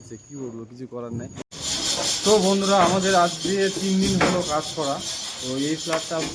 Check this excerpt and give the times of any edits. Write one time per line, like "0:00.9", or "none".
0:01.5